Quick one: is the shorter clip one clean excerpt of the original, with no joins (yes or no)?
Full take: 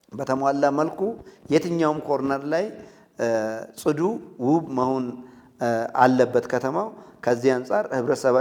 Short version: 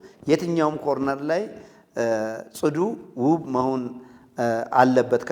yes